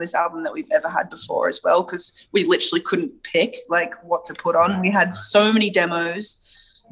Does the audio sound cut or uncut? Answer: uncut